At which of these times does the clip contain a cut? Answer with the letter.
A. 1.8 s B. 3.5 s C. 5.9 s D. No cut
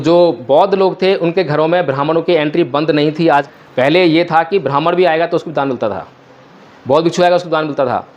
B